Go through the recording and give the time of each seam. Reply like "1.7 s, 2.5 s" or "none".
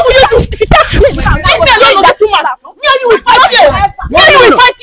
none